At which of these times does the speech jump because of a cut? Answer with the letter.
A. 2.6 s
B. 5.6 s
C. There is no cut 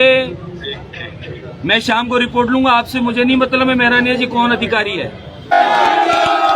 B